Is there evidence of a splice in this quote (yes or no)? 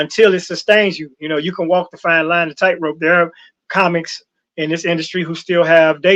no